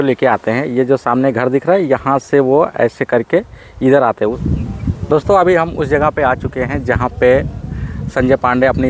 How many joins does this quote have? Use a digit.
1